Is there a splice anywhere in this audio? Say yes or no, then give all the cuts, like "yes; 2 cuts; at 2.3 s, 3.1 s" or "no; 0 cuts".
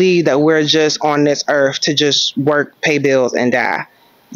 no; 0 cuts